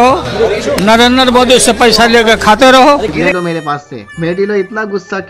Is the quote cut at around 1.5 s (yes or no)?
no